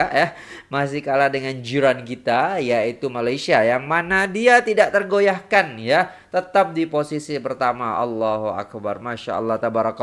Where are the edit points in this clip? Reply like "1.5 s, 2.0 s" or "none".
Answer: none